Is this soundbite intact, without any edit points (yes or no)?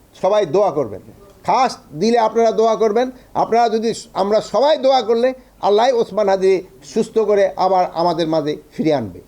yes